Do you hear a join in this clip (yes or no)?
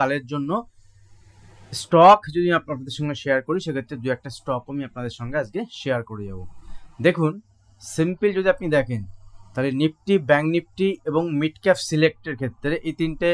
no